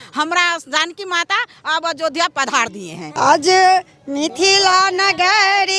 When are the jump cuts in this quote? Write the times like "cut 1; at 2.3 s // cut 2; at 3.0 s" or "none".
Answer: cut 1; at 3.0 s

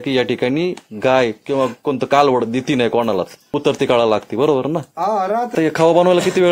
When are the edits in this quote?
cut 1; at 3.5 s // cut 2; at 5.5 s

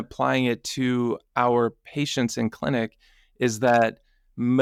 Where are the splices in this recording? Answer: none

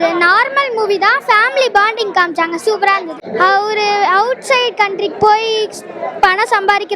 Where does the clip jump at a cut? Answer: cut 1; at 3.2 s

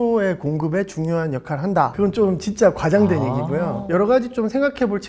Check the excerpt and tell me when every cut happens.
none

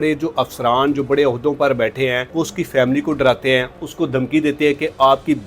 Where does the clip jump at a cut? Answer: cut 1; at 2.2 s

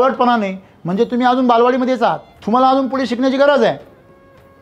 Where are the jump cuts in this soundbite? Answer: cut 1; at 2.3 s

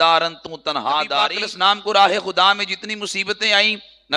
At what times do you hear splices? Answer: cut 1; at 1.3 s

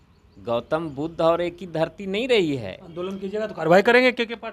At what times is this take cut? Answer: none

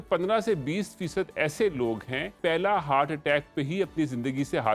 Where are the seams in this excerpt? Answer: cut 1; at 2.3 s

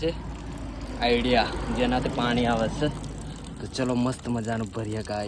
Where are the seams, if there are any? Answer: none

